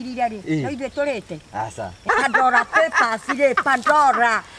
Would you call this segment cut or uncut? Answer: cut